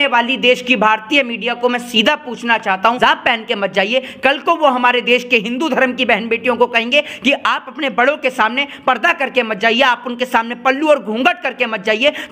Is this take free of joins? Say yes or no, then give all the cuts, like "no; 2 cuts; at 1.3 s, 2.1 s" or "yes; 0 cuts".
no; 1 cut; at 3.0 s